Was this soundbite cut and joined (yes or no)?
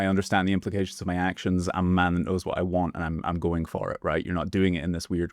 no